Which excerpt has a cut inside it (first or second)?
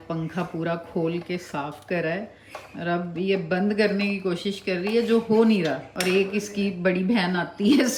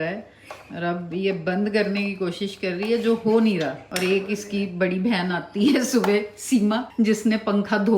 second